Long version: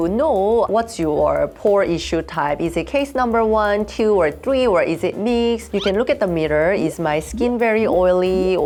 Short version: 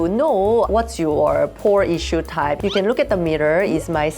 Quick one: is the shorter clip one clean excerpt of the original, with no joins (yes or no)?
no